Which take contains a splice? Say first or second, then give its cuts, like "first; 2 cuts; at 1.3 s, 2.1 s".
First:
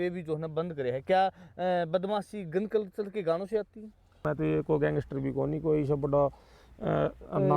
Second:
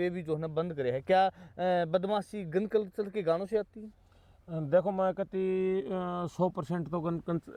first; 1 cut; at 4.2 s